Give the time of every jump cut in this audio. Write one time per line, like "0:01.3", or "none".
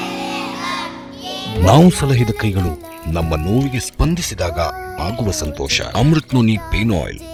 none